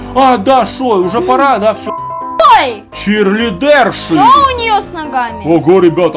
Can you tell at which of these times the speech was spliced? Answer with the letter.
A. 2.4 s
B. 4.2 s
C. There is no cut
A